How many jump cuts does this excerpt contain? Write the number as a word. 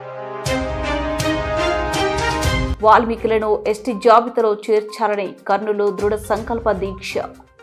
zero